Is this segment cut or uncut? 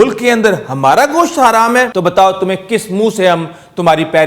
cut